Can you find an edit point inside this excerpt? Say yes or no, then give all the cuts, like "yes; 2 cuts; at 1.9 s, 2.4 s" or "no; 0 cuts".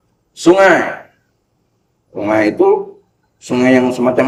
no; 0 cuts